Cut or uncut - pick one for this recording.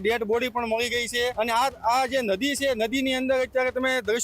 cut